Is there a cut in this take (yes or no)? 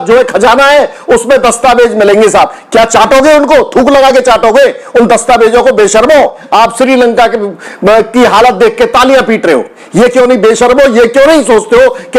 yes